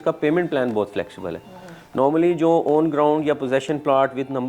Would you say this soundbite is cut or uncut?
uncut